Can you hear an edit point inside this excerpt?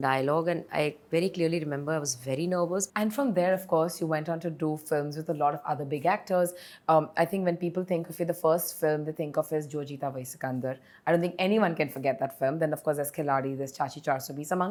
no; 0 cuts

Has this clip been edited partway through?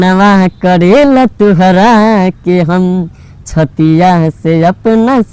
no; 0 cuts

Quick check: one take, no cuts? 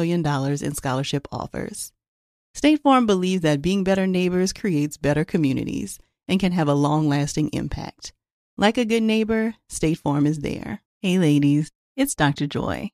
no; 1 cut; at 10.8 s

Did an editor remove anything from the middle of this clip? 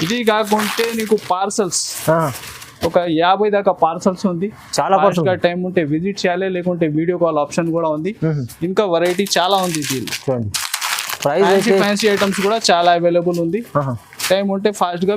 no; 0 cuts

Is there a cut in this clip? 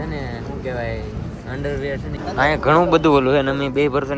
yes; 1 cut; at 2.1 s

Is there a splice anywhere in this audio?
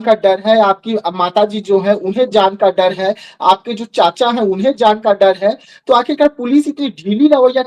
no; 0 cuts

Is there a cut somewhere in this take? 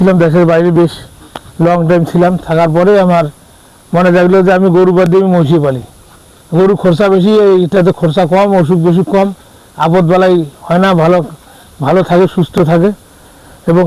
no; 0 cuts

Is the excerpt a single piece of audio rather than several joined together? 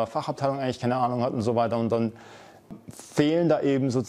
no; 1 cut; at 2.7 s

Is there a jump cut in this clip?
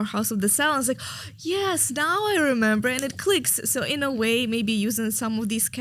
no; 0 cuts

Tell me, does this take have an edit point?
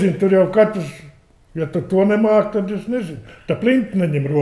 no; 0 cuts

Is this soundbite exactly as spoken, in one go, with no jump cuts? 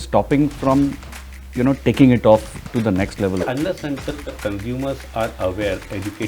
no; 1 cut; at 3.4 s

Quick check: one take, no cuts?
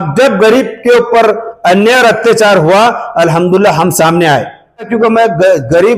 no; 1 cut; at 4.9 s

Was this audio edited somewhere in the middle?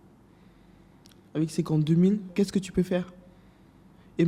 yes; 1 cut; at 2.3 s

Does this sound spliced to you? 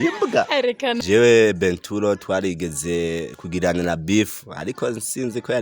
yes; 1 cut; at 1.0 s

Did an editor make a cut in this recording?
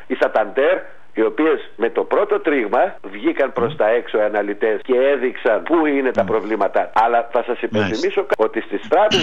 yes; 6 cuts; at 1.0 s, 3.1 s, 4.8 s, 5.6 s, 6.9 s, 8.3 s

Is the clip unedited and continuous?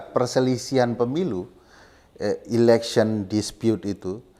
yes; 0 cuts

